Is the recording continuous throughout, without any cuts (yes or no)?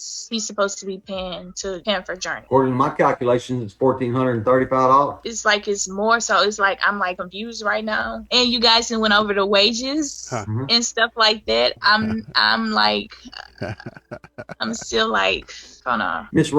no